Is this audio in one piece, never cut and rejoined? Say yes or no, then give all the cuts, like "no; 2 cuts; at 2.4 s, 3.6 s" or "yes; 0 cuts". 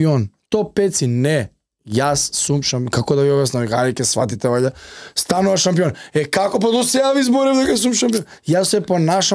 yes; 0 cuts